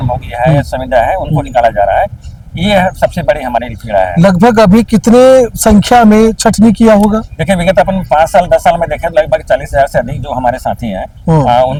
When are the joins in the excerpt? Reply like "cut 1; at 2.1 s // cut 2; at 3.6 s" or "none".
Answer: none